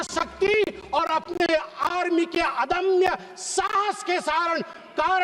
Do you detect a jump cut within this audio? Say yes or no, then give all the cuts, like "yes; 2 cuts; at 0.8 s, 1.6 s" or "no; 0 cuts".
no; 0 cuts